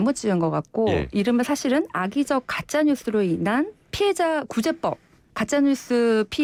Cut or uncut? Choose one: uncut